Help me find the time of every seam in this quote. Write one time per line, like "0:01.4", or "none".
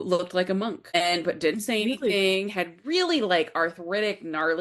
0:00.9